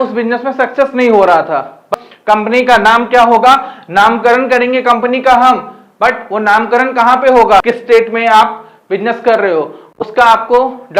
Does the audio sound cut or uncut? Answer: cut